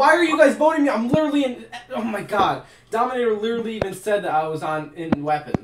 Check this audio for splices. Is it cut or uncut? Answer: uncut